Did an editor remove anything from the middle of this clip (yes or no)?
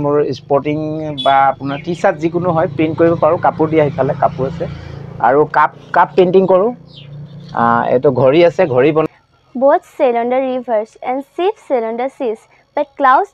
yes